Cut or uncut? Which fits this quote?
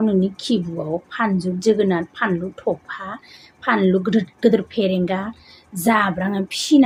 uncut